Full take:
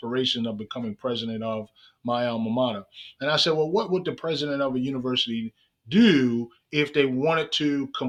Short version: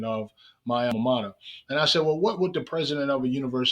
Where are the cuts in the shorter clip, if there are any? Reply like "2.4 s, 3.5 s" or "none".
0.9 s